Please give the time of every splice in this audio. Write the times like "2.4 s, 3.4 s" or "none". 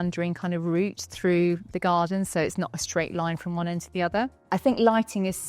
4.4 s